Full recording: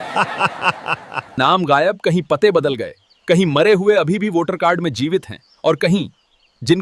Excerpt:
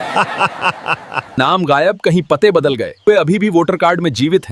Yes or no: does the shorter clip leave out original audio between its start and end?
yes